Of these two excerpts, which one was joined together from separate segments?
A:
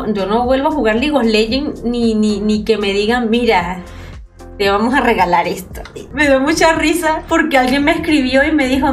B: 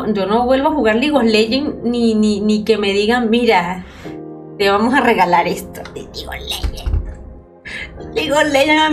A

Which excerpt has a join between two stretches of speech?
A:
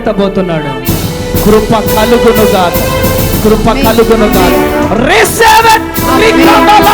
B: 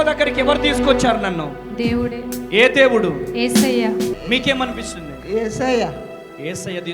B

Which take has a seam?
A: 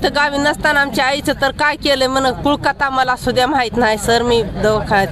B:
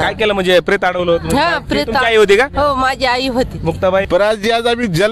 B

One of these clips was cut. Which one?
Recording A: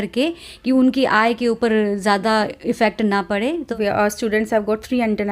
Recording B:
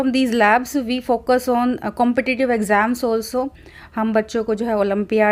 A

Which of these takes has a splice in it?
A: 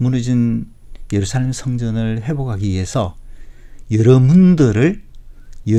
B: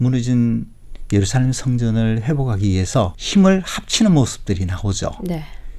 B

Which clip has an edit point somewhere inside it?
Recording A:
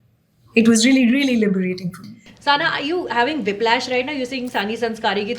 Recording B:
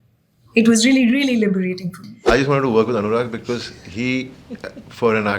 B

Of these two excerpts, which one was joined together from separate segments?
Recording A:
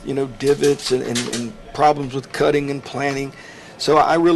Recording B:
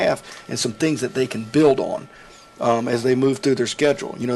A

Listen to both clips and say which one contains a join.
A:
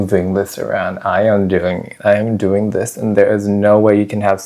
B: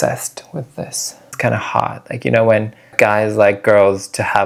B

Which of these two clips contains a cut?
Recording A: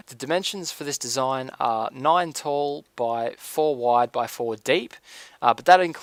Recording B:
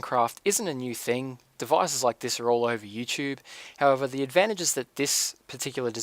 B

